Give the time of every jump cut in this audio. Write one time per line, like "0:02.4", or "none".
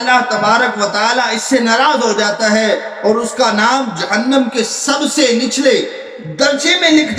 none